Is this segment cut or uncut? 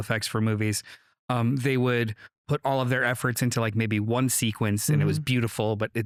uncut